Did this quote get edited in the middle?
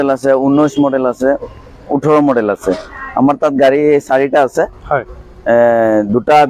no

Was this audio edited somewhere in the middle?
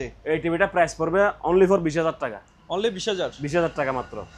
no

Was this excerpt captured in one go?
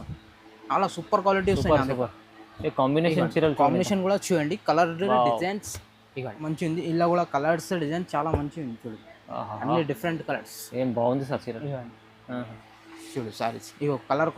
no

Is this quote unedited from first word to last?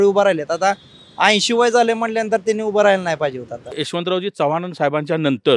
no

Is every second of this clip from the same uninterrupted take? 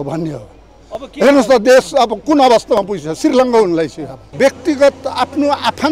no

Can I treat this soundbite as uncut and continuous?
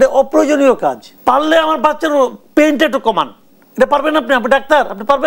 no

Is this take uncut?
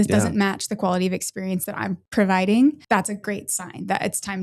no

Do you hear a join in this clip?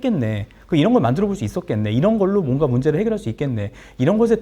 no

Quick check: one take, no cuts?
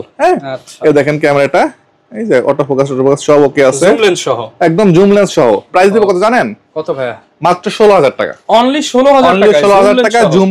yes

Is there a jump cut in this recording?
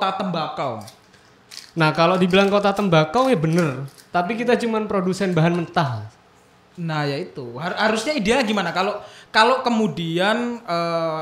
no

